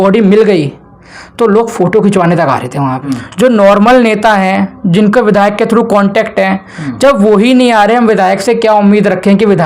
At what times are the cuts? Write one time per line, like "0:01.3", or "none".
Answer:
0:03.1